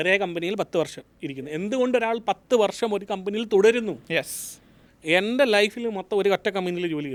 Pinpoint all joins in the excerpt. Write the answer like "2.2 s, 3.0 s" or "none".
none